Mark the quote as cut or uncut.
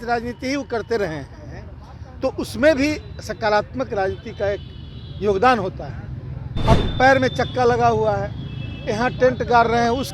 uncut